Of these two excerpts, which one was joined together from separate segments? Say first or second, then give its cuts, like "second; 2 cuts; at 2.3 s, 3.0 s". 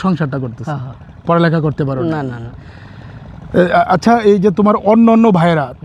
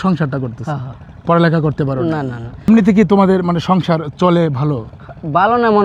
second; 1 cut; at 2.7 s